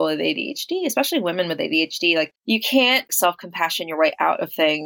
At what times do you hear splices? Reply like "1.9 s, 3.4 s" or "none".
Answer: 2.4 s